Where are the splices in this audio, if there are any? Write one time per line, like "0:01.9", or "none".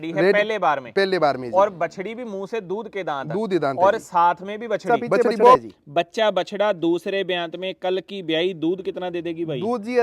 0:05.6